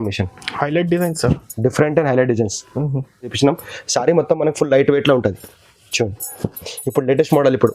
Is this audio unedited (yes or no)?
no